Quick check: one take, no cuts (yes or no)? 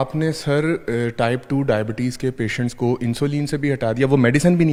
yes